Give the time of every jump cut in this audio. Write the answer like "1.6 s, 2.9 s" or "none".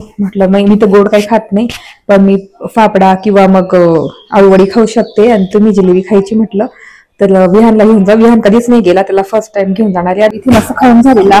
10.3 s